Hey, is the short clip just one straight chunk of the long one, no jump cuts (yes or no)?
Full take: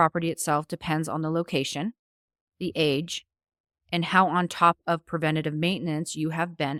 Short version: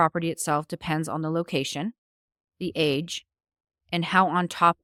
yes